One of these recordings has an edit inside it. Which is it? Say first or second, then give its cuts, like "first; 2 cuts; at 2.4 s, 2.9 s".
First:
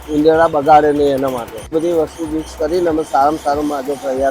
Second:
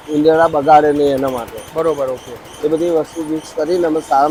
first; 1 cut; at 1.7 s